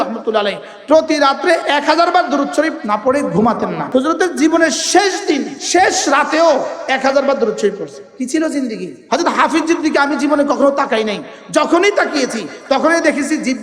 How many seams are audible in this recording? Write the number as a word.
five